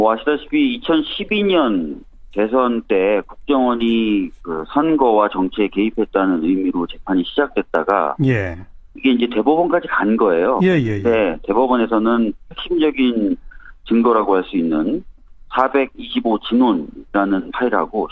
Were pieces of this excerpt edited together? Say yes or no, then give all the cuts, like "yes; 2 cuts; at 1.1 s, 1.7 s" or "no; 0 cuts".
yes; 1 cut; at 7.2 s